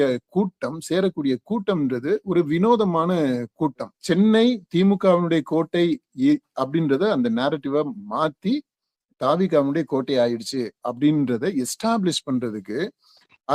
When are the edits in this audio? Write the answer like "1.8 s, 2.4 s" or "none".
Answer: 3.9 s